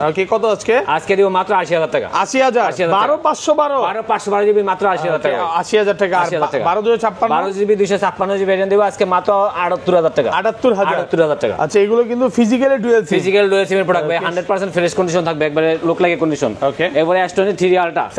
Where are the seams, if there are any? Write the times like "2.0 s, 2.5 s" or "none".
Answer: none